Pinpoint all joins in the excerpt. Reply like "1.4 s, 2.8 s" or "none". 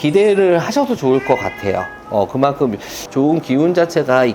2.9 s